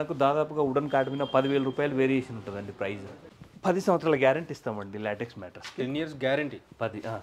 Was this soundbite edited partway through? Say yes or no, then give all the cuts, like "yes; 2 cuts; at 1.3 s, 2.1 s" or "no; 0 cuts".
yes; 1 cut; at 3.3 s